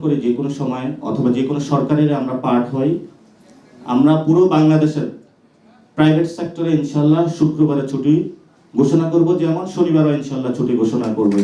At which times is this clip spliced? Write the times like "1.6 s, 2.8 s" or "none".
none